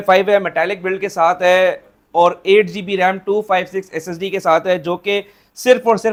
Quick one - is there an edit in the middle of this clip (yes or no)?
no